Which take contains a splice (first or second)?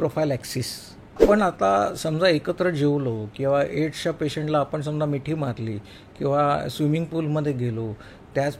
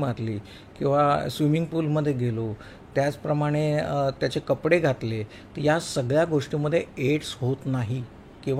first